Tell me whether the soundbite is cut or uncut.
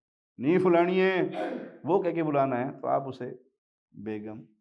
uncut